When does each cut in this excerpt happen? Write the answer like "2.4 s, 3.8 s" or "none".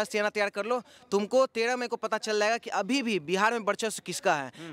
none

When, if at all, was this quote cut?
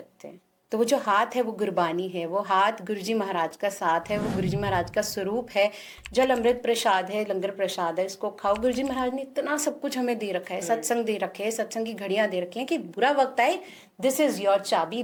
none

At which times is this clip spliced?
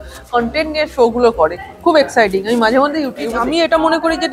3.3 s

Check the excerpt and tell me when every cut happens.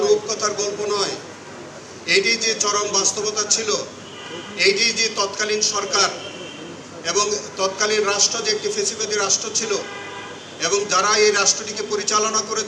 none

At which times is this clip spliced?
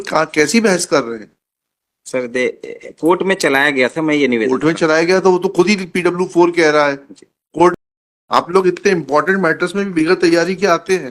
7.7 s

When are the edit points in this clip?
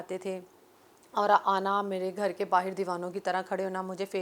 none

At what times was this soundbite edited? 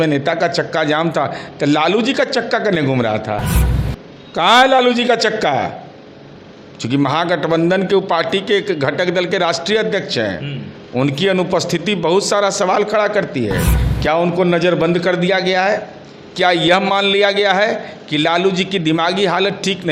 none

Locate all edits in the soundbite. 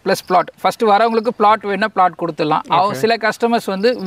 none

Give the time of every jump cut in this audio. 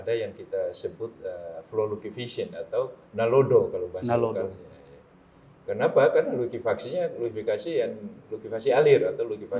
none

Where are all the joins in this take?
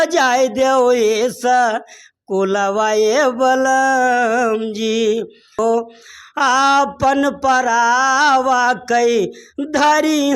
5.6 s

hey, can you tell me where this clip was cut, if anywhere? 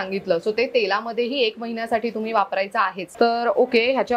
3.0 s

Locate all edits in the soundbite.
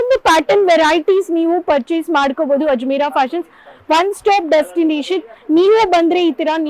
none

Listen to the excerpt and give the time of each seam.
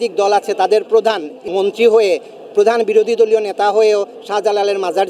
1.5 s

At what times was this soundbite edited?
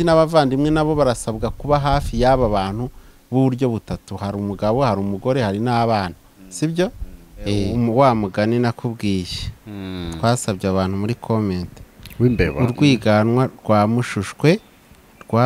7.7 s

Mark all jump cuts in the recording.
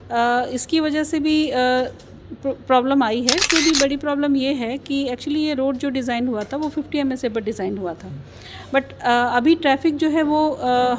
3.4 s

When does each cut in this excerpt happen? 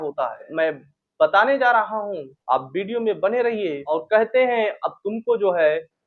3.8 s

